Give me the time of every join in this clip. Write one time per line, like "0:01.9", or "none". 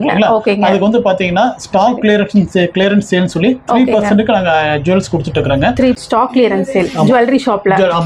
0:06.0